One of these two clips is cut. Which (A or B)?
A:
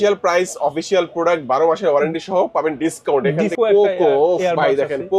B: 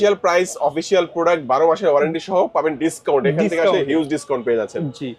A